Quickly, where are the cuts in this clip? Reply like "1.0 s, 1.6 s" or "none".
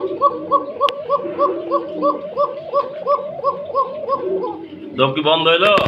none